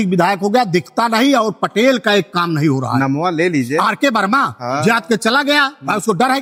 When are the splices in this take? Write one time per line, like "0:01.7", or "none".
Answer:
none